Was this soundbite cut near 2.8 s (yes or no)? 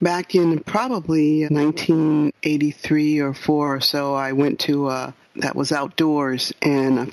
no